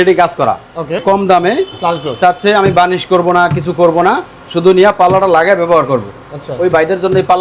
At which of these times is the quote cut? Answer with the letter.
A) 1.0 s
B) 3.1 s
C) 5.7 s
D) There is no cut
A